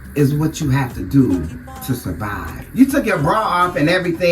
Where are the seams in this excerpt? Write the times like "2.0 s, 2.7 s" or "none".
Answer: 2.6 s

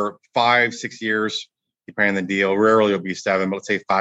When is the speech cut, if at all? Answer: none

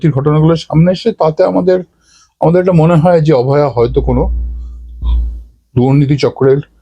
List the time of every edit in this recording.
none

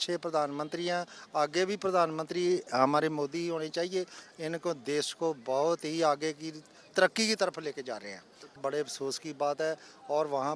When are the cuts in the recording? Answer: 8.6 s

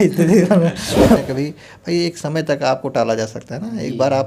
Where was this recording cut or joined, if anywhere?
1.2 s

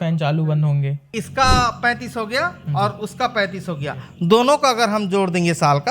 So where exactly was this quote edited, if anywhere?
1.0 s

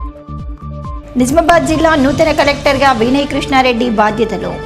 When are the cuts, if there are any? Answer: 1.0 s

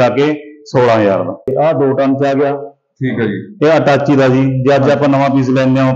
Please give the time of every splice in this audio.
1.5 s

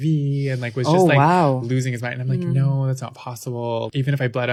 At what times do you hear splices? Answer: none

